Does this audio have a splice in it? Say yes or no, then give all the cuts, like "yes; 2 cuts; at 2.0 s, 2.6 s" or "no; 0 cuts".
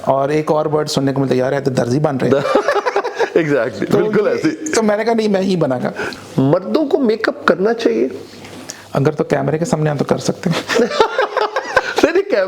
yes; 1 cut; at 6.1 s